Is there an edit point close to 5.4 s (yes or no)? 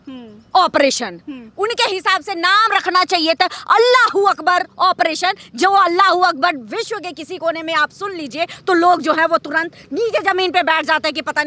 no